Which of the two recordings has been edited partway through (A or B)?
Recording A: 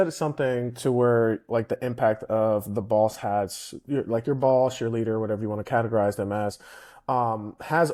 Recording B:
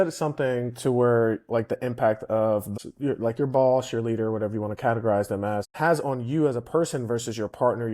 B